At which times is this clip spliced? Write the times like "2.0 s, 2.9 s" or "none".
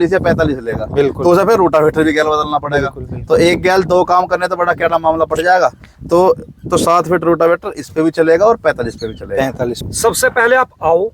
9.8 s